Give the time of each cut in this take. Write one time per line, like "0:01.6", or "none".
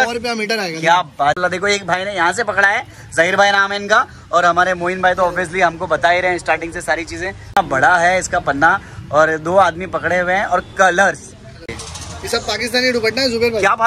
0:01.4
0:07.5
0:11.6